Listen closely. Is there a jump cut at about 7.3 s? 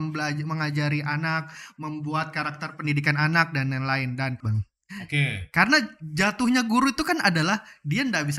no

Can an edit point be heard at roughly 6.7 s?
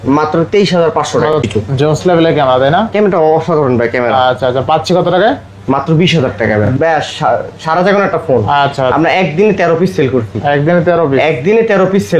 yes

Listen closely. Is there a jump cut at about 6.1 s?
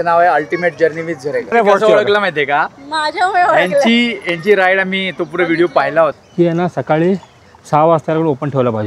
yes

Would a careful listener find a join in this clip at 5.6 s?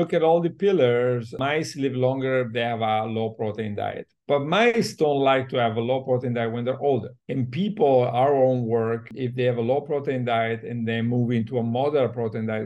no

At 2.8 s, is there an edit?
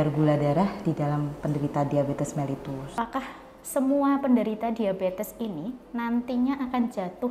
yes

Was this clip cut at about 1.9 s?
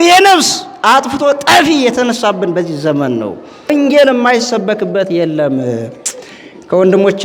no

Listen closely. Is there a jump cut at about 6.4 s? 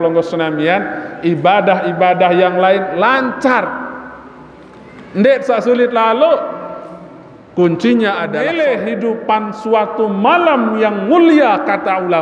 no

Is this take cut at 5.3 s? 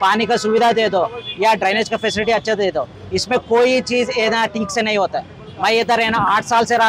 no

